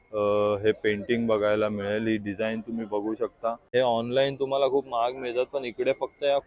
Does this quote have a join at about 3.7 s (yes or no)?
yes